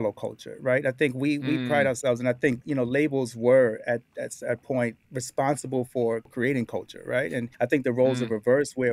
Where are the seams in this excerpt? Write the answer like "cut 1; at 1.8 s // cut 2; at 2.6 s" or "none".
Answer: cut 1; at 5.0 s // cut 2; at 6.3 s // cut 3; at 7.5 s